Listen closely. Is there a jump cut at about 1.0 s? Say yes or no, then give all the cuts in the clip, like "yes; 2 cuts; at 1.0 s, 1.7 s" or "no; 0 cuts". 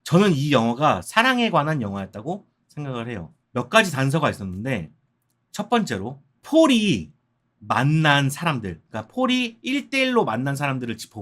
yes; 1 cut; at 1.0 s